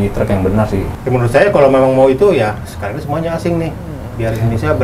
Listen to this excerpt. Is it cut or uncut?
cut